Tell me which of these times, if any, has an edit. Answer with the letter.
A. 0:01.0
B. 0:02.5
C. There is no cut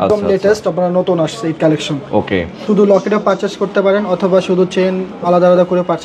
B